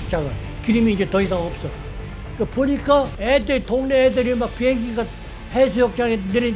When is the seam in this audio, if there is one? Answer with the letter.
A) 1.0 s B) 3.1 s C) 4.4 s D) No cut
B